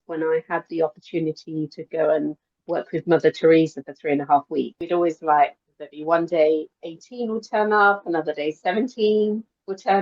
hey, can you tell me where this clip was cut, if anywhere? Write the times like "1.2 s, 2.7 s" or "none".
4.8 s